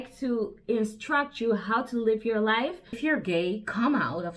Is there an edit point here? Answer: yes; 1 cut; at 3.0 s

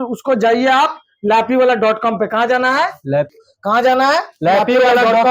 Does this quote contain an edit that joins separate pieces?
yes; 1 cut; at 3.3 s

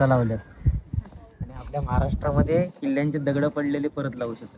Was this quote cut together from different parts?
no; 0 cuts

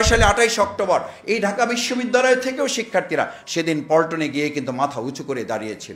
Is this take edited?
no; 0 cuts

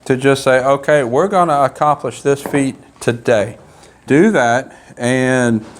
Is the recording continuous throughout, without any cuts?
no; 1 cut; at 4.0 s

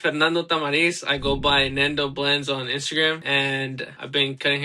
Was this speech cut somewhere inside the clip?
yes; 1 cut; at 3.6 s

